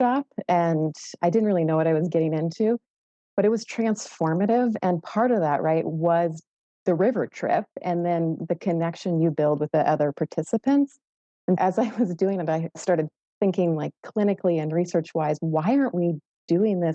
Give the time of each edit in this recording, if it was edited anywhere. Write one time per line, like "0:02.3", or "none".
0:09.6
0:11.6
0:12.7